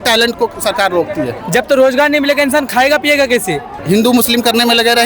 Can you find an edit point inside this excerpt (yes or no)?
yes